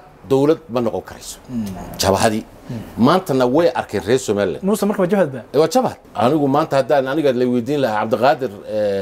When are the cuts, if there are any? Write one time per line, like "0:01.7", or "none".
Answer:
0:06.0